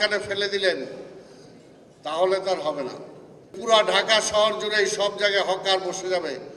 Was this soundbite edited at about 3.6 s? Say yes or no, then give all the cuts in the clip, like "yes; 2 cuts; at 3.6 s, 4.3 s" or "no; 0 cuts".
yes; 1 cut; at 3.6 s